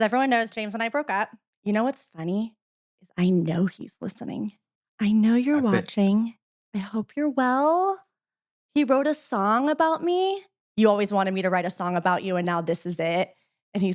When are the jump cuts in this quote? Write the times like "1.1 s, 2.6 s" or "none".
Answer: 1.5 s, 10.6 s